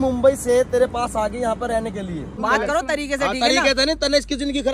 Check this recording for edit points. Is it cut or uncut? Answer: cut